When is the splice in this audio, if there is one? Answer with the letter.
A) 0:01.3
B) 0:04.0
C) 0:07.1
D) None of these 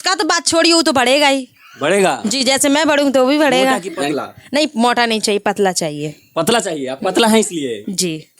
B